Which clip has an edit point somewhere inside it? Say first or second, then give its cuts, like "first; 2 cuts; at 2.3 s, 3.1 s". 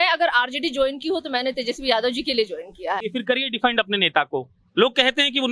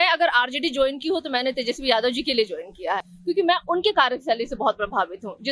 first; 1 cut; at 3.1 s